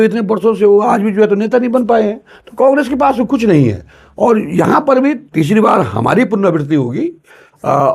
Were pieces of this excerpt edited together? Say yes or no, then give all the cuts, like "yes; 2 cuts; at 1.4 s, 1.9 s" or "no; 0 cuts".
no; 0 cuts